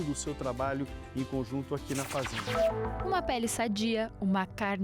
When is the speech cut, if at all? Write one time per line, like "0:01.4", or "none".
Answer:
0:02.4